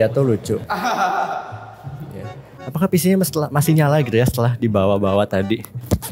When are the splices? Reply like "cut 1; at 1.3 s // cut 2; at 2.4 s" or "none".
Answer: cut 1; at 2.5 s